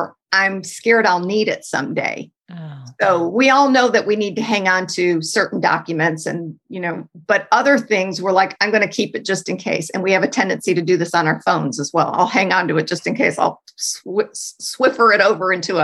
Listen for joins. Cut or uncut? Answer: uncut